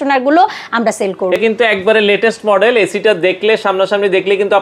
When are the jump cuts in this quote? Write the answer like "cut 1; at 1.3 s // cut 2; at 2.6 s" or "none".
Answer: cut 1; at 1.4 s